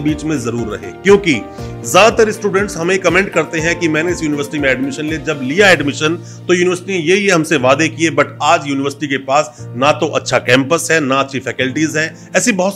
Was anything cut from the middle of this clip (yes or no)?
no